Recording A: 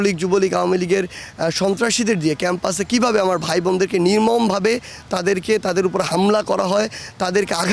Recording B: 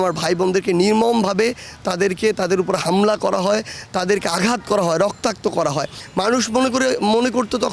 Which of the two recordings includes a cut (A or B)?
B